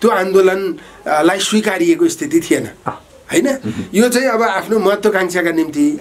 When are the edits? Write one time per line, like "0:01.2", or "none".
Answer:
none